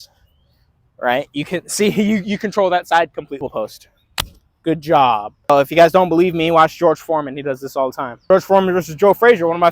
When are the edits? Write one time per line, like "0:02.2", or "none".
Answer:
0:03.4
0:05.5
0:08.3